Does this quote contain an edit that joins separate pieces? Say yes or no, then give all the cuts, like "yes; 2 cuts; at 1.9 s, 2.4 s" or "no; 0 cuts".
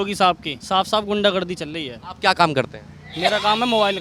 no; 0 cuts